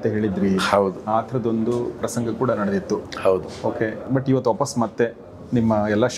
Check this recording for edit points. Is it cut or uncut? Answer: uncut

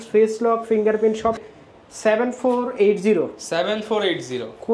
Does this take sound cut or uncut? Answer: cut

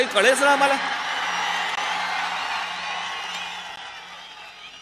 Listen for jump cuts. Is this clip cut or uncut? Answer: uncut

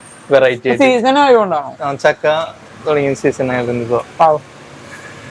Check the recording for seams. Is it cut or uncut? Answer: uncut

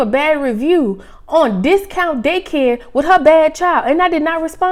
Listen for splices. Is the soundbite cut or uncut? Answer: uncut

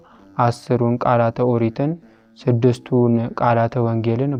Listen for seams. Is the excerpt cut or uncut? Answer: uncut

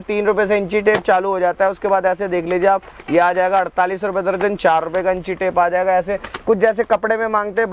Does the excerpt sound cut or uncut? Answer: uncut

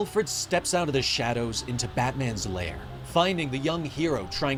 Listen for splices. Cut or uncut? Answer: uncut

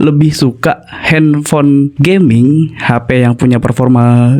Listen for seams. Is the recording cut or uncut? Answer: cut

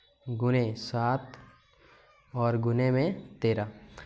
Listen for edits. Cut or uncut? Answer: uncut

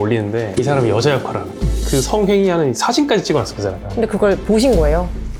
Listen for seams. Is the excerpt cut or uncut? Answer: uncut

